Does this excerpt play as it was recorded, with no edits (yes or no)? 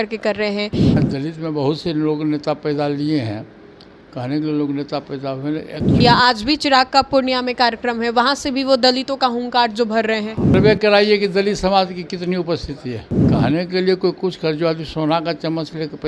no